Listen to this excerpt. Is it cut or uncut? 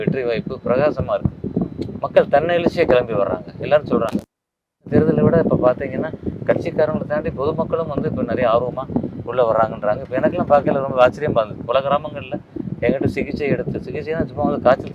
uncut